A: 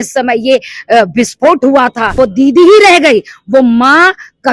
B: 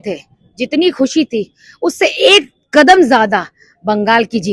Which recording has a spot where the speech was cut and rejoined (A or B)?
A